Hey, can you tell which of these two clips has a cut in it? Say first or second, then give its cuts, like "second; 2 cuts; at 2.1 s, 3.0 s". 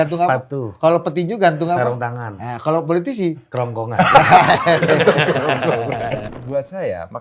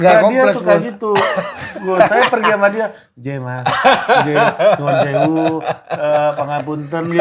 first; 1 cut; at 6.3 s